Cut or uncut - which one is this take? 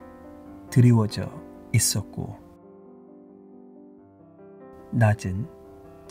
cut